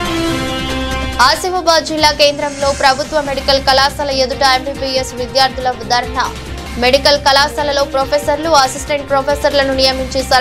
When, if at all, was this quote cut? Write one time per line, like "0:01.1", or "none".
none